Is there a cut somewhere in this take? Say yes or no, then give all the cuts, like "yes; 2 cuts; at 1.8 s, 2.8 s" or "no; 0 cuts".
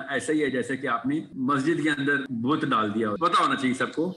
yes; 3 cuts; at 1.3 s, 2.3 s, 3.2 s